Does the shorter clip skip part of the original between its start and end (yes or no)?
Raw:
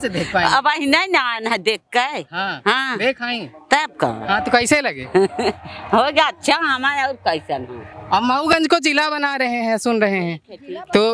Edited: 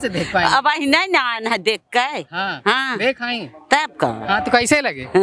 no